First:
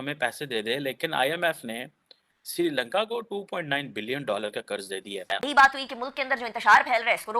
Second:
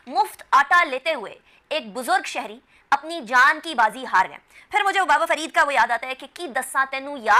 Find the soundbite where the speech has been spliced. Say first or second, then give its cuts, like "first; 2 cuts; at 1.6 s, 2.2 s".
first; 1 cut; at 5.3 s